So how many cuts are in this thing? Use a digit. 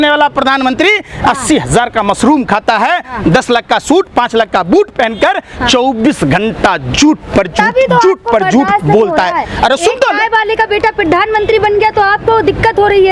0